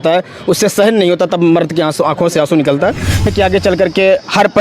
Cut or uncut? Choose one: cut